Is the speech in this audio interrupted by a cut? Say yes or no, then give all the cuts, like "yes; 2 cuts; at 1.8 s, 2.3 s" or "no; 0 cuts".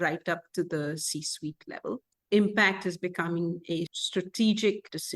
yes; 1 cut; at 4.0 s